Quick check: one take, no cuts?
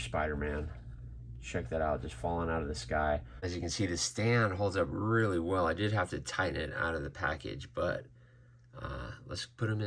no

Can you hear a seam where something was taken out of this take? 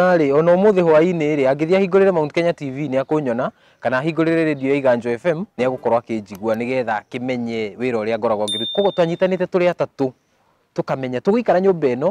yes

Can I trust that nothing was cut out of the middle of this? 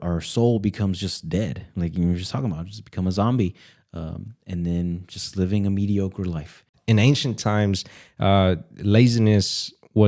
no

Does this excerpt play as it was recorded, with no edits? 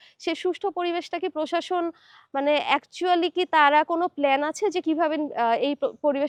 yes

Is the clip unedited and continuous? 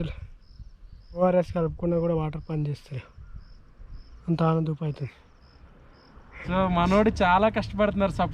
no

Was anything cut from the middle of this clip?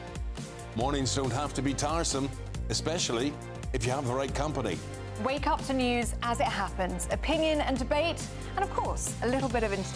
no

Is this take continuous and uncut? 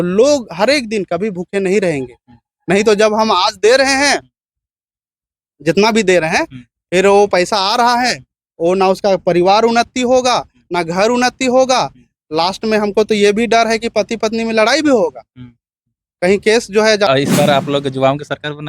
no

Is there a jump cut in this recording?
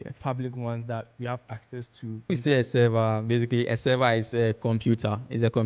yes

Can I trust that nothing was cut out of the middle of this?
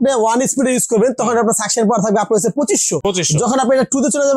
yes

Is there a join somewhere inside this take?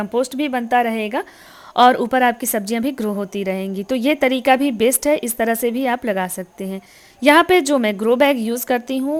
no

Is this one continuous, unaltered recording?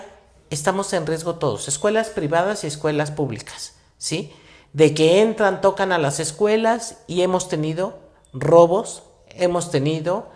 yes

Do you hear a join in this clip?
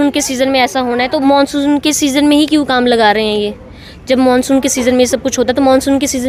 no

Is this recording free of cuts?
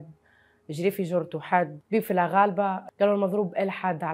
no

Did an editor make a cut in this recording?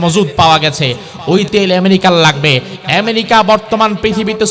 yes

